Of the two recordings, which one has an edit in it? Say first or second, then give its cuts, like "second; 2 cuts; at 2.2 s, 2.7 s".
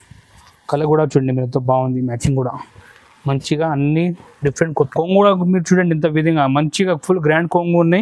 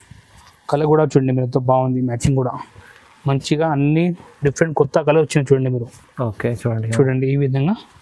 first; 1 cut; at 4.9 s